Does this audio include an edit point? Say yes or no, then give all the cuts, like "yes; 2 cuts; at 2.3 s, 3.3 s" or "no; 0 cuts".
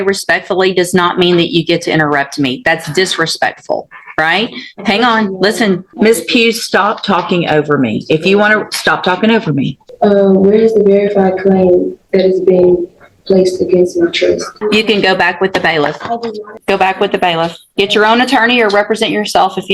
yes; 4 cuts; at 5.9 s, 9.8 s, 14.5 s, 16.6 s